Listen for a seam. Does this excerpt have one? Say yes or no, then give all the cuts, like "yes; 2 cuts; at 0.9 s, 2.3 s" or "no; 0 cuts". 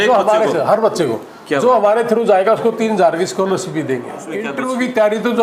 yes; 1 cut; at 4.5 s